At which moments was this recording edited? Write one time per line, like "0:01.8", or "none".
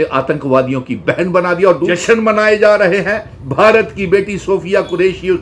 0:01.9